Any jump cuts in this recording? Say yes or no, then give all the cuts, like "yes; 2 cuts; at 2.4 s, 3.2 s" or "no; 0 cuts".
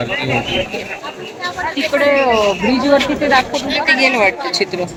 no; 0 cuts